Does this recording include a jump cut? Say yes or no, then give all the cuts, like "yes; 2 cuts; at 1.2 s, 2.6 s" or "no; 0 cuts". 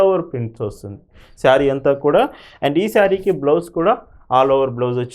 no; 0 cuts